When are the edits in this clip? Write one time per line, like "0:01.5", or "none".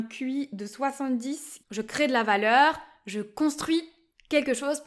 0:01.5